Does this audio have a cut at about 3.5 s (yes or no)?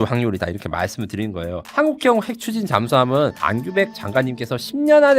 no